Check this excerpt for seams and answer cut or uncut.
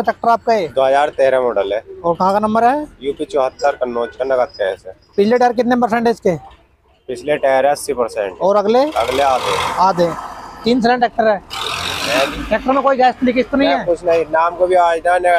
uncut